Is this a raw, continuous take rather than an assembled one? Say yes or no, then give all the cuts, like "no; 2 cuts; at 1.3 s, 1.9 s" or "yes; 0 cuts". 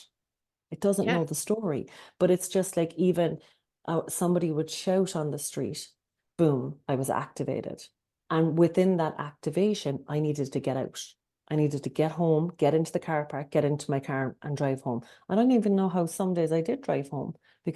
yes; 0 cuts